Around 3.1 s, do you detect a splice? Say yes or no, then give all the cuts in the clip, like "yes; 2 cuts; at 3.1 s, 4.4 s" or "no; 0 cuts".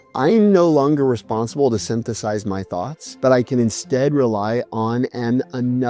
no; 0 cuts